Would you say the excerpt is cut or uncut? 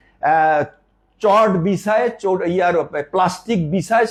uncut